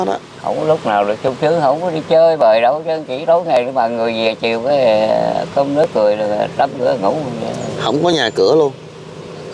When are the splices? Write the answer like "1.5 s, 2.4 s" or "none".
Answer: none